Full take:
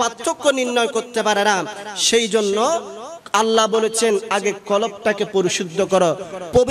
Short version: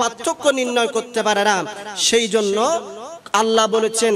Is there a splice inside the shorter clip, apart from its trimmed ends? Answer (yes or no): no